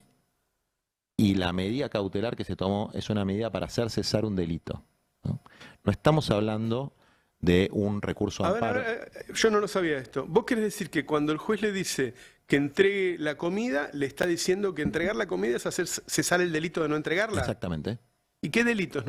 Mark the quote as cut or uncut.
uncut